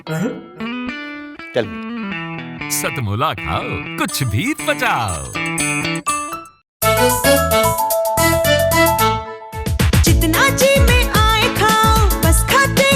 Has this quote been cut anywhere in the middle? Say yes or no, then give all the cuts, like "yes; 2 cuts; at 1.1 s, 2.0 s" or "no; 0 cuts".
yes; 1 cut; at 6.7 s